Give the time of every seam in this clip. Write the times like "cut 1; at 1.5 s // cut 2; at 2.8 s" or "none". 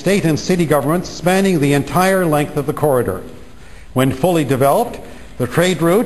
cut 1; at 3.6 s